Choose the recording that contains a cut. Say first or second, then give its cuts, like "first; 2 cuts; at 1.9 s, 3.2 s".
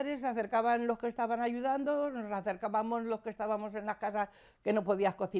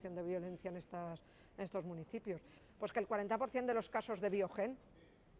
second; 1 cut; at 2.5 s